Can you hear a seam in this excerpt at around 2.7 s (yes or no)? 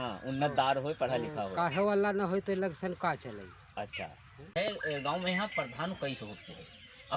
no